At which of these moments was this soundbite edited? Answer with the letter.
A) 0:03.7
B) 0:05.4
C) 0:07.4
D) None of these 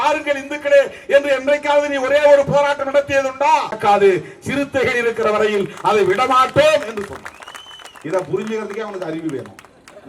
A